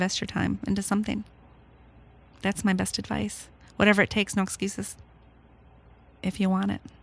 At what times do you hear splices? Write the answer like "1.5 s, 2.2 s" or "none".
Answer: 6.1 s